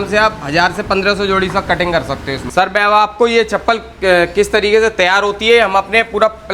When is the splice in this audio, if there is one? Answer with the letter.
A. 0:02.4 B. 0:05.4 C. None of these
A